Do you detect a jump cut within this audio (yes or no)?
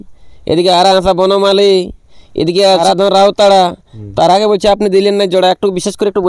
yes